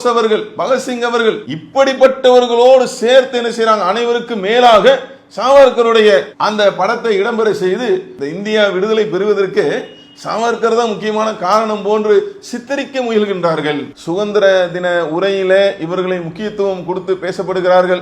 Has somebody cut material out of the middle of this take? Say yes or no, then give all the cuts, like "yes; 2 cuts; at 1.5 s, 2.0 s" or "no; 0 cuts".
yes; 2 cuts; at 8.2 s, 13.9 s